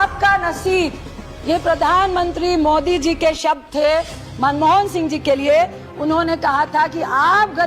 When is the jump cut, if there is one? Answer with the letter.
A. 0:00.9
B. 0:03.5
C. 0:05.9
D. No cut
D